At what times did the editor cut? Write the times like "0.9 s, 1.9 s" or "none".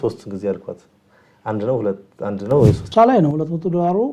2.8 s